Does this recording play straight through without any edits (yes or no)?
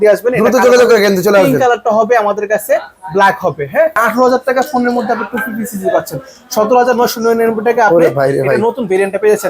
no